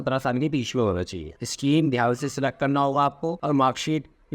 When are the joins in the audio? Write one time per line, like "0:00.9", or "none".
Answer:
0:01.3